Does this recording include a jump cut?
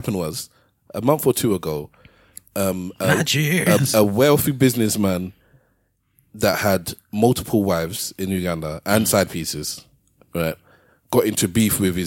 no; 0 cuts

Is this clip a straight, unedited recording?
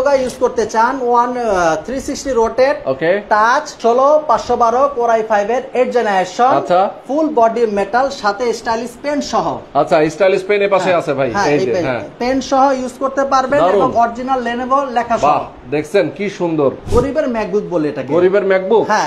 no; 2 cuts; at 3.7 s, 16.9 s

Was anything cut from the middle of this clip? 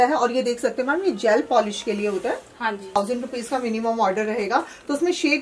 yes; 1 cut; at 3.0 s

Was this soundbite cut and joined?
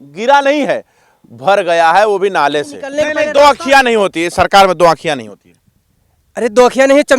yes; 1 cut; at 2.8 s

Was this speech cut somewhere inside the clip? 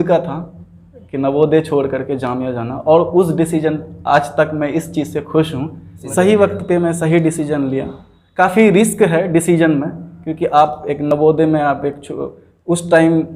no; 0 cuts

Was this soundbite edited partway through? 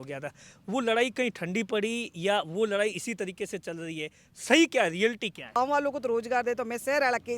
yes; 1 cut; at 5.6 s

